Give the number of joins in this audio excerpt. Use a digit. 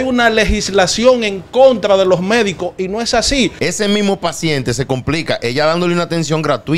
1